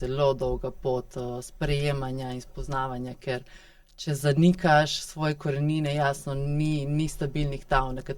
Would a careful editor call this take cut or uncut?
uncut